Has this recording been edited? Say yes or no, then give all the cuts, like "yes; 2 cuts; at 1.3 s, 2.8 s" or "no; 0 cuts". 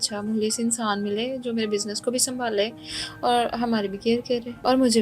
no; 0 cuts